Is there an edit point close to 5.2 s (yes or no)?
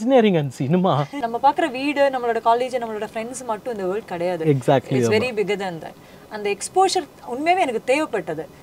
no